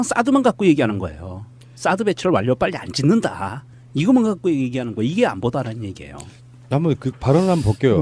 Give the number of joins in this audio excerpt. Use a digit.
1